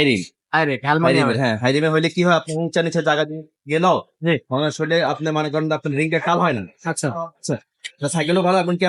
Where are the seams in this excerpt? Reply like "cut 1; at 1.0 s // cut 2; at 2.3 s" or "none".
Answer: none